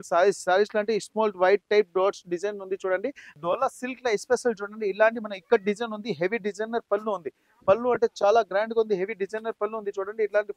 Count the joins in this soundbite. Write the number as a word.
one